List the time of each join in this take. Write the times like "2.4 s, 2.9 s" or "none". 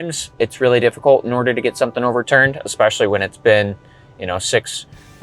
2.2 s